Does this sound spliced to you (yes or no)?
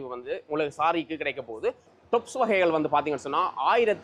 no